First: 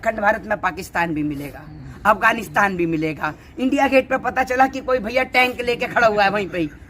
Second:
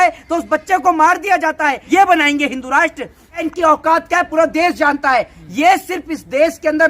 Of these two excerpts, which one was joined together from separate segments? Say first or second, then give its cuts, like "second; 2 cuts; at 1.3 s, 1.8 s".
second; 2 cuts; at 1.8 s, 3.4 s